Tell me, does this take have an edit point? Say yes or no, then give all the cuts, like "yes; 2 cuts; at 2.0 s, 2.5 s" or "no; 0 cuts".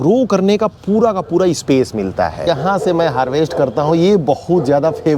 yes; 1 cut; at 2.5 s